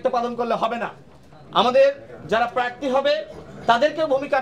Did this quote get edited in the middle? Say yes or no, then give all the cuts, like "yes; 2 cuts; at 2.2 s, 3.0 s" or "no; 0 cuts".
no; 0 cuts